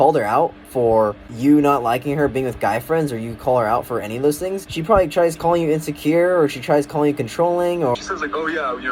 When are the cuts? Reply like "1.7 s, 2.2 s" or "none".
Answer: 1.3 s, 4.7 s, 7.9 s